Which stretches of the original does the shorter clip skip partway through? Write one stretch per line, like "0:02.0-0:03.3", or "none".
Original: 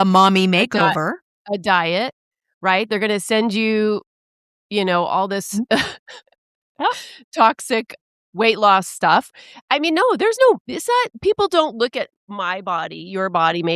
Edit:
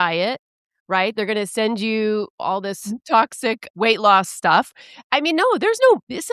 0:04.6-0:07.1
0:07.9-0:08.2